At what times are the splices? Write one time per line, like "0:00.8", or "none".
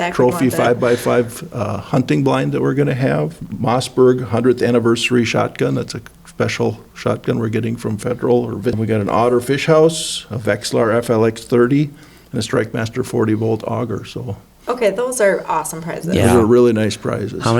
0:03.4
0:08.8